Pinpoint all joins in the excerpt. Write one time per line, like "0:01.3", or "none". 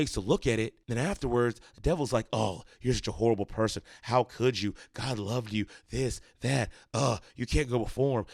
none